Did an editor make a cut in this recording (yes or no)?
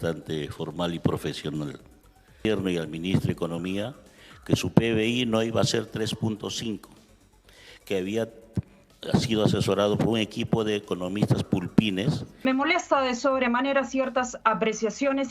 yes